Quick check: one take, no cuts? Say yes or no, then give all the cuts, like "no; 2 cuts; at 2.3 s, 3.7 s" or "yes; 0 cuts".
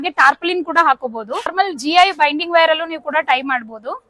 no; 1 cut; at 1.5 s